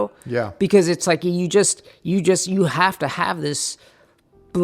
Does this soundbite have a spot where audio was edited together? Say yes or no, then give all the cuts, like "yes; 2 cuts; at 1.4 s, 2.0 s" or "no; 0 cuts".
no; 0 cuts